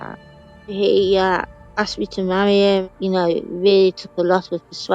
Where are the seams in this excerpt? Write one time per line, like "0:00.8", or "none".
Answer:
0:00.7
0:02.8